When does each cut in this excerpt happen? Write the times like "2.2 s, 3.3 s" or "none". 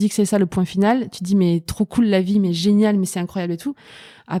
none